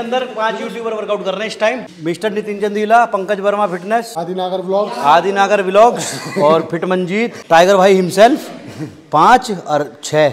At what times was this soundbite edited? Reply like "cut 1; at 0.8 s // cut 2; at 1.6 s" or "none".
cut 1; at 1.9 s // cut 2; at 4.1 s // cut 3; at 7.4 s